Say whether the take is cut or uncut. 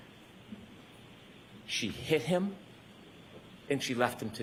uncut